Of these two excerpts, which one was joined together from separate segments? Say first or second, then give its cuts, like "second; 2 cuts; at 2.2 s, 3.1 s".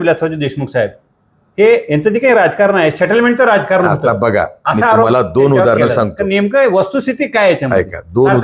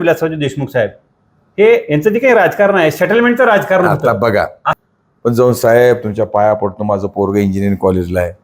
second; 1 cut; at 4.6 s